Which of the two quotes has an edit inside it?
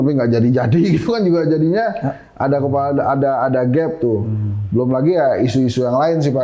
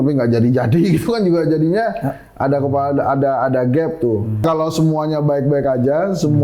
second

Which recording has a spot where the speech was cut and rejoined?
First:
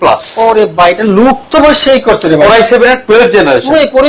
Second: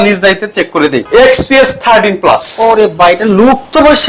second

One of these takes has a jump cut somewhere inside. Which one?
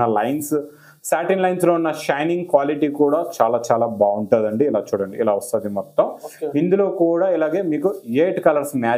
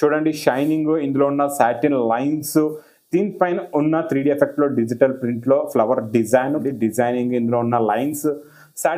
second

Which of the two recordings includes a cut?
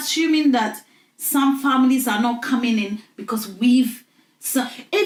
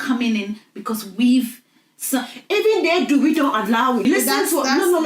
second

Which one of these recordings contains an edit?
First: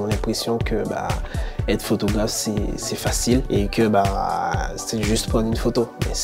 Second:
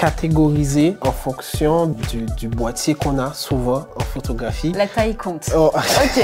second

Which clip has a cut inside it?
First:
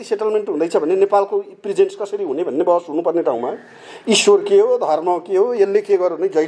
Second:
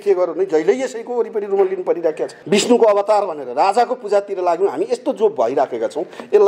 second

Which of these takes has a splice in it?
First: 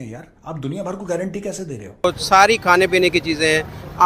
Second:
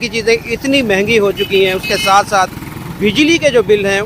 first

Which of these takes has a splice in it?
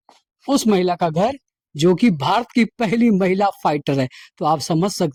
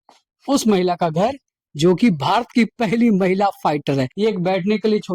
second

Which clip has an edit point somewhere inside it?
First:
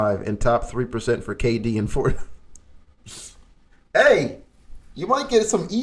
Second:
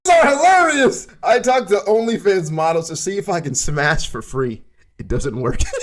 second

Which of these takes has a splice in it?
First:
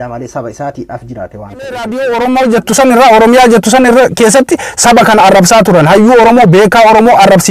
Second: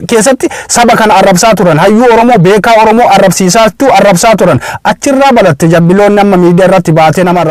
first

